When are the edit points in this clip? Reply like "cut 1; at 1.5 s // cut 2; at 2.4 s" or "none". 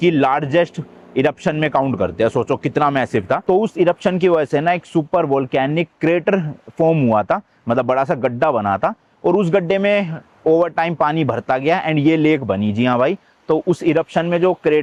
none